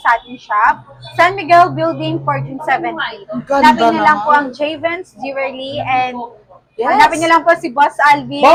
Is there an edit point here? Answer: no; 0 cuts

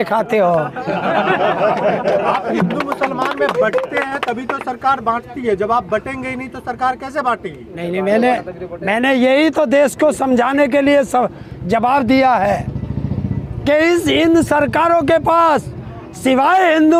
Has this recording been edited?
no; 0 cuts

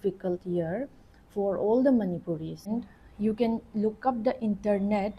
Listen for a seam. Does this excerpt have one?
yes; 1 cut; at 2.7 s

